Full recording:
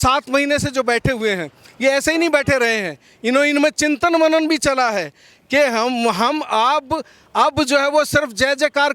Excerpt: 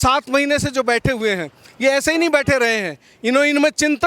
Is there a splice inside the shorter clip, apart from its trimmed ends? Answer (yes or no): no